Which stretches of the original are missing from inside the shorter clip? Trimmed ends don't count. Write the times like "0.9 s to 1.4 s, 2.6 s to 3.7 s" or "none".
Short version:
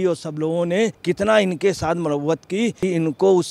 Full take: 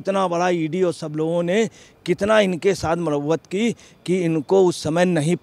1.7 s to 2.0 s, 3.8 s to 4.1 s